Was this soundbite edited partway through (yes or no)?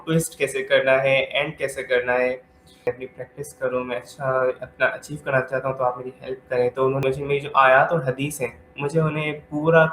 yes